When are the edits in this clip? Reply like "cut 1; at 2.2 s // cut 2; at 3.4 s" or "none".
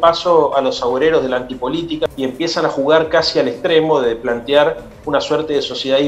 cut 1; at 2.1 s